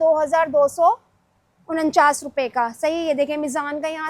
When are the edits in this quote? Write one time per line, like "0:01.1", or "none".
none